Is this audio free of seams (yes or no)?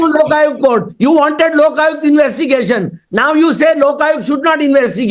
yes